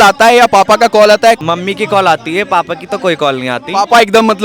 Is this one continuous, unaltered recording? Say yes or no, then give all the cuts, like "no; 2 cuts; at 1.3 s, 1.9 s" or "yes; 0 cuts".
no; 1 cut; at 1.4 s